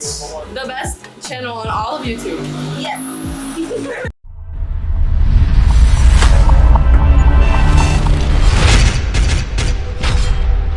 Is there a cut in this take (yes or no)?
no